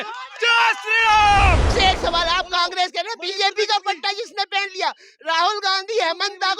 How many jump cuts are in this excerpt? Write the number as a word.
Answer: one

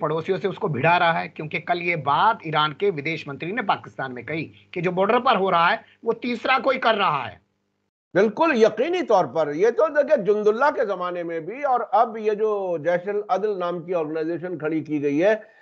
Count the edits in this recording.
zero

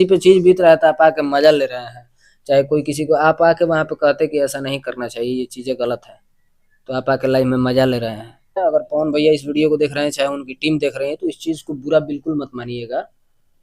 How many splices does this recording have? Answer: one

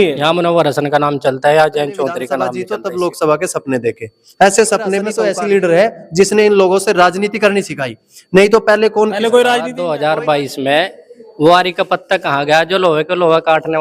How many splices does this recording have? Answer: three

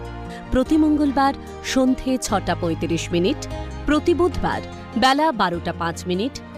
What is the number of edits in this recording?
zero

